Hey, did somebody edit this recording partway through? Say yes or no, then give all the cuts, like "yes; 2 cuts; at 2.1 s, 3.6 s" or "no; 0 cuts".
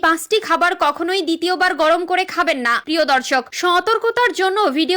yes; 1 cut; at 2.8 s